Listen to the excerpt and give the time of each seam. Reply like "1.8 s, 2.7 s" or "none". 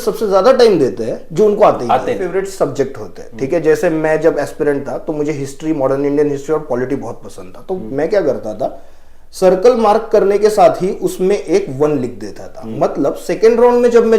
2.3 s